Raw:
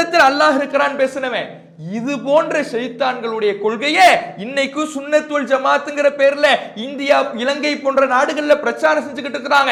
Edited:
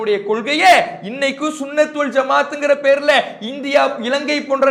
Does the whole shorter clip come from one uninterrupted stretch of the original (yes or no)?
yes